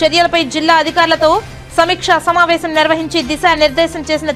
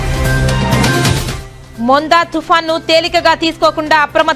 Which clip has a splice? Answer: second; 1 cut; at 1.3 s

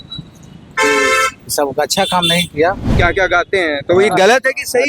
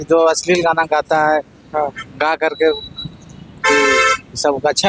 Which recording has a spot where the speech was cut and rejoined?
first; 1 cut; at 2.9 s

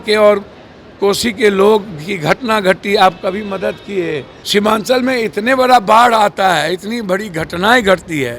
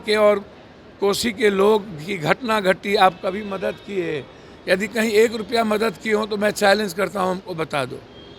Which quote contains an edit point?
first; 1 cut; at 4.3 s

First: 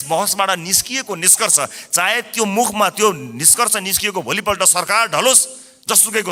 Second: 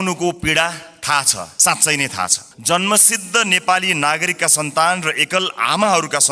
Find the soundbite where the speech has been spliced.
second; 2 cuts; at 1.4 s, 2.5 s

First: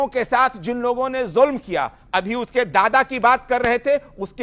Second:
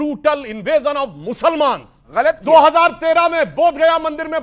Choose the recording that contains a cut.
second; 1 cut; at 2.0 s

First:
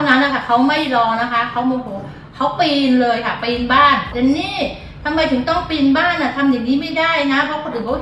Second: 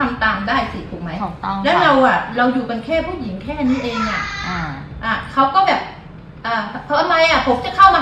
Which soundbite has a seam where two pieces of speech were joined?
first; 1 cut; at 4.1 s

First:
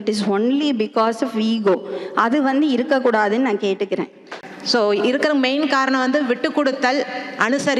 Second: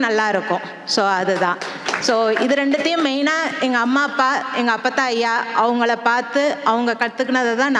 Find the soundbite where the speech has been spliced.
first; 1 cut; at 4.4 s

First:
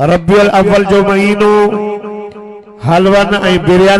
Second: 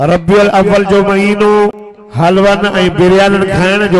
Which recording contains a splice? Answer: second; 1 cut; at 1.8 s

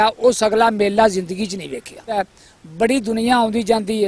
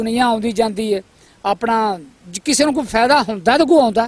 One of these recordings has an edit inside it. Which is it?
first; 1 cut; at 2.2 s

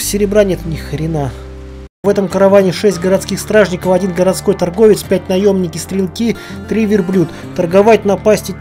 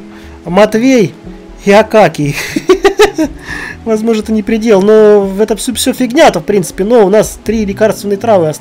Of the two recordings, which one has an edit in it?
first; 1 cut; at 2.0 s

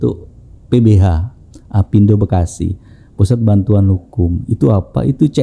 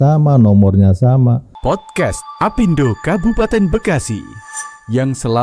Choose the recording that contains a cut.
second; 1 cut; at 1.5 s

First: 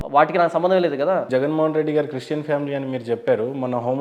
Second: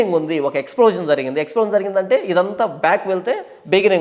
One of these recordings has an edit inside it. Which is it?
first; 1 cut; at 1.3 s

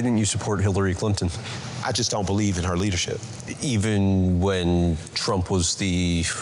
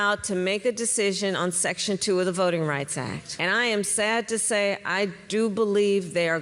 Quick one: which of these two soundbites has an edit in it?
second; 1 cut; at 3.2 s

